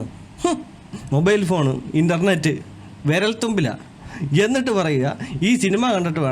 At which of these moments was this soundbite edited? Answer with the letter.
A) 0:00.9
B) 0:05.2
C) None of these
A